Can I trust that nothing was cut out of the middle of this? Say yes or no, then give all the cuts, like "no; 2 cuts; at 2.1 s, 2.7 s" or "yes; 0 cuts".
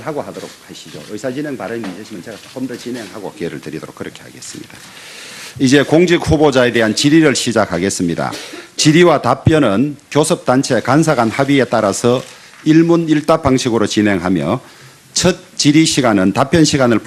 no; 1 cut; at 7.5 s